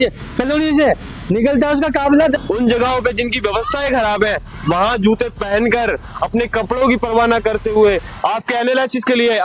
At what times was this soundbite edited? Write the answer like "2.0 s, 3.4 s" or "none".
2.4 s